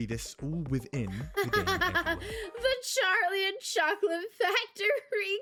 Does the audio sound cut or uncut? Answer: uncut